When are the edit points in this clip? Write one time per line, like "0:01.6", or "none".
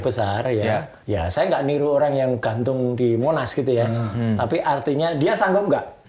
0:00.9